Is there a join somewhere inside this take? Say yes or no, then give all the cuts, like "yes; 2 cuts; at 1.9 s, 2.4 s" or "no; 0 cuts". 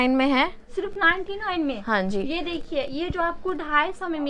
no; 0 cuts